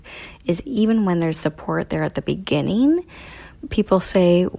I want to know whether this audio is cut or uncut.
uncut